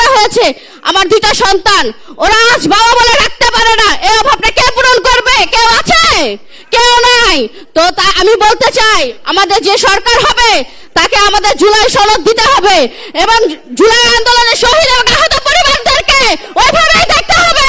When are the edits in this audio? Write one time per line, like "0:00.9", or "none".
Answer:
none